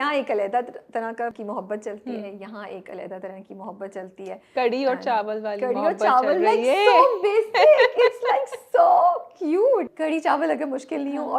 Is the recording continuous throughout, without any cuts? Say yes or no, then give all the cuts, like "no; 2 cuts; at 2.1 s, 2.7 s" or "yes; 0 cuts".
no; 2 cuts; at 1.4 s, 9.9 s